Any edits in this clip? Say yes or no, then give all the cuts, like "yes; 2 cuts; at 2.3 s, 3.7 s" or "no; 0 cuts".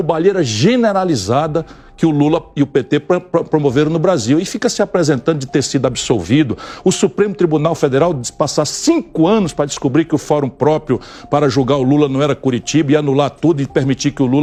no; 0 cuts